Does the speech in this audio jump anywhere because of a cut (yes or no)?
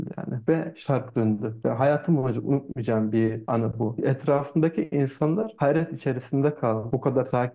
no